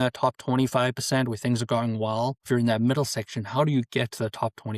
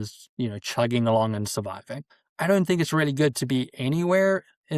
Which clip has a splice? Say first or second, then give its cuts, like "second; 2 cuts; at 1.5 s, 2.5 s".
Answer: first; 1 cut; at 2.4 s